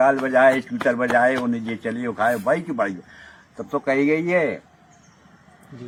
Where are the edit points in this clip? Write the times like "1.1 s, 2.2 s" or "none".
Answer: none